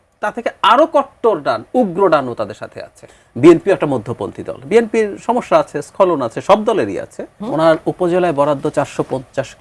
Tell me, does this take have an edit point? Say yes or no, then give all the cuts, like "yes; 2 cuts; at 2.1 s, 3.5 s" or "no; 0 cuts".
yes; 2 cuts; at 3.0 s, 7.4 s